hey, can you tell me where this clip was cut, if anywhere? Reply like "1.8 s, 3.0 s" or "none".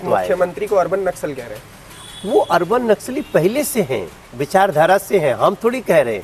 none